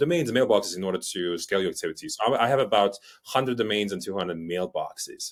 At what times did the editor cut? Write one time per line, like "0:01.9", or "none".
none